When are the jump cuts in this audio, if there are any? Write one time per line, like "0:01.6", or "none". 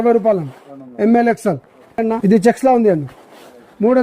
0:02.0